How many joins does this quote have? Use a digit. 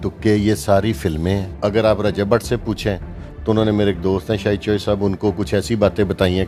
1